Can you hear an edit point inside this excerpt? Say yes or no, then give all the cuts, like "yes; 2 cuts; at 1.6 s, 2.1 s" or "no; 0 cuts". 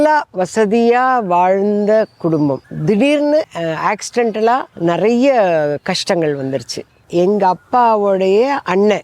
yes; 4 cuts; at 2.7 s, 3.5 s, 4.7 s, 7.0 s